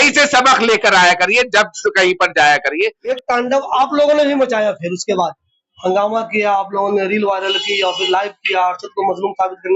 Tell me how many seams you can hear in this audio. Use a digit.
1